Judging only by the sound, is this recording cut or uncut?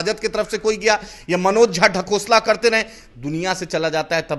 uncut